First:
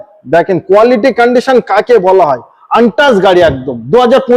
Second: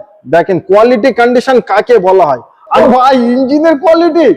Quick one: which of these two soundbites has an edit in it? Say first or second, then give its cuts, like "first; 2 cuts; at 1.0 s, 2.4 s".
second; 1 cut; at 2.8 s